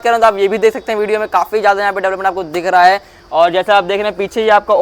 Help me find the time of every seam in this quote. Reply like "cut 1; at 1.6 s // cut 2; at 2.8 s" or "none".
none